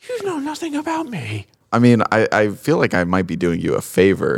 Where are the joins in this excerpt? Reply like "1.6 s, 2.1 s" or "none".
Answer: none